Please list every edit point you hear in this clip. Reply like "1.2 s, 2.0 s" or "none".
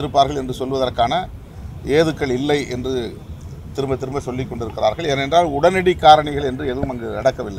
none